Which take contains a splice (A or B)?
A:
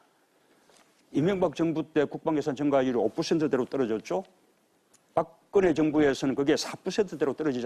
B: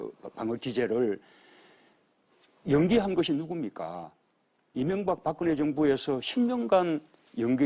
B